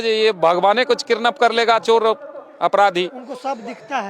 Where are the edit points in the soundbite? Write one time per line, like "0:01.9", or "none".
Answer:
none